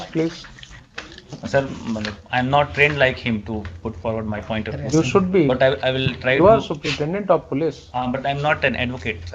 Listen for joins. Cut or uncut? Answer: uncut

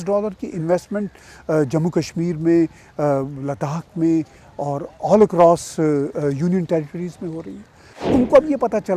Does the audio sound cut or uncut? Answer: cut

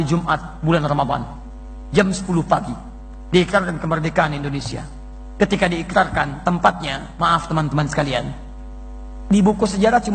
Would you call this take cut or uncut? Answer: uncut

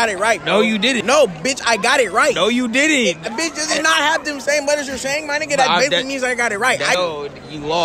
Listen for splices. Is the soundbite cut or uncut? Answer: cut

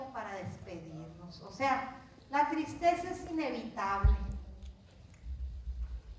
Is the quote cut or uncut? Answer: cut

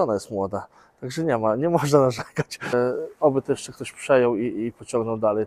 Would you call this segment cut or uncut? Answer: cut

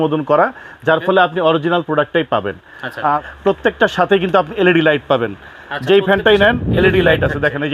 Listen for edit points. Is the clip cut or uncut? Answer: cut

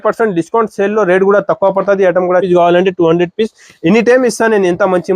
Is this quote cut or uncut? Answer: cut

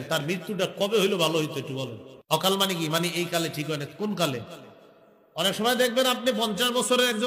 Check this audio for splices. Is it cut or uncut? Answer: cut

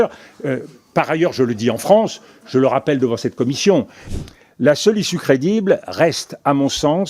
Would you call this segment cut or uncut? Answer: cut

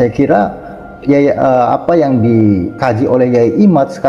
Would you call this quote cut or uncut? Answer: cut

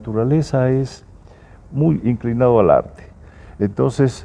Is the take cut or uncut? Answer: uncut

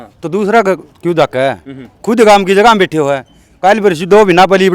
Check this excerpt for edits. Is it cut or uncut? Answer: uncut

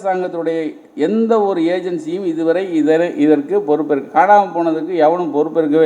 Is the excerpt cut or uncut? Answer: uncut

